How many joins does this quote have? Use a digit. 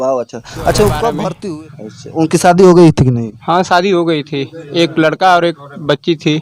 1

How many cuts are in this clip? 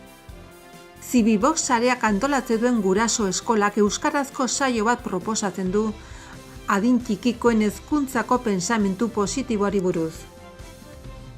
2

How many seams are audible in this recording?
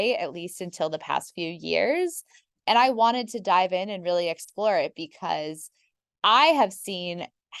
0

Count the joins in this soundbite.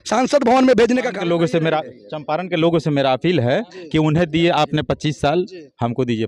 1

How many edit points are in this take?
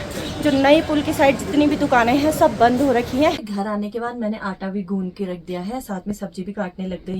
1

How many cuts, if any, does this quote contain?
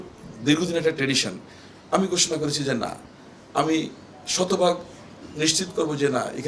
0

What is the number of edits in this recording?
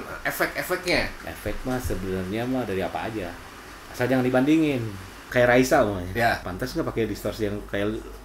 3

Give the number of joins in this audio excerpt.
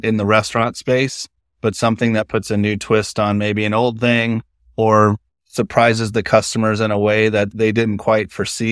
1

